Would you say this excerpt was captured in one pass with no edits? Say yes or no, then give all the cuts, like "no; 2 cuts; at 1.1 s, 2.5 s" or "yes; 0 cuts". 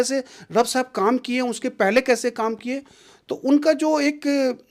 yes; 0 cuts